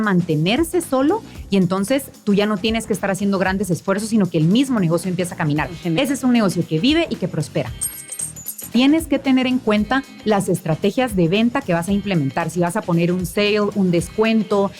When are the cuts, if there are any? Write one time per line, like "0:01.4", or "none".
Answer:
0:08.3